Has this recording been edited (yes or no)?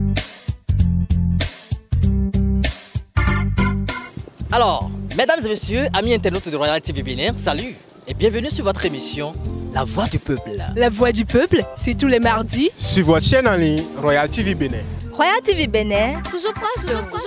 yes